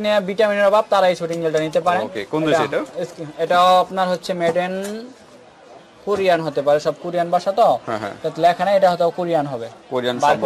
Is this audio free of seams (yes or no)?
yes